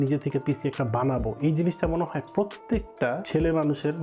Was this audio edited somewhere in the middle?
no; 0 cuts

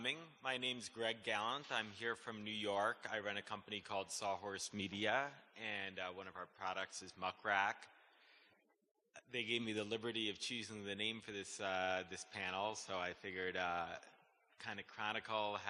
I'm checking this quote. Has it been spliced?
no; 0 cuts

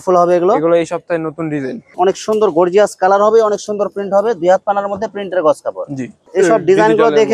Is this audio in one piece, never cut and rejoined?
no; 2 cuts; at 1.9 s, 6.2 s

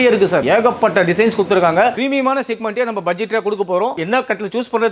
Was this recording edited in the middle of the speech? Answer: yes; 2 cuts; at 1.9 s, 4.0 s

